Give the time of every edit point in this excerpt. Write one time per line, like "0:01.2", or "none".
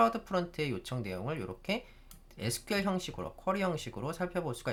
none